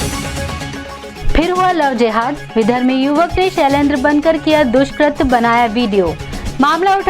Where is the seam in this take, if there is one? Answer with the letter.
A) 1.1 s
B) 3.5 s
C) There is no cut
A